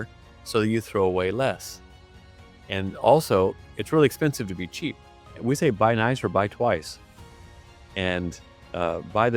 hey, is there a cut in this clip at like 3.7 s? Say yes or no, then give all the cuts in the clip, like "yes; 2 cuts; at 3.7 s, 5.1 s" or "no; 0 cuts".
yes; 2 cuts; at 3.7 s, 5.4 s